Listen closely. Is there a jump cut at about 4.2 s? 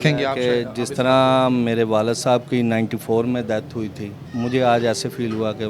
yes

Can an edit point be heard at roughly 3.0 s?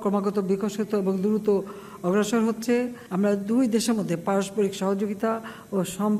yes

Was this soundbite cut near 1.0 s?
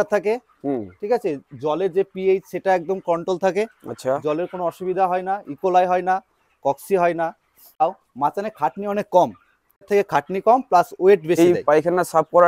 no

